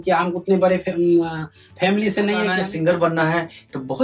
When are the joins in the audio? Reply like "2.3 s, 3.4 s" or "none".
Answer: 2.5 s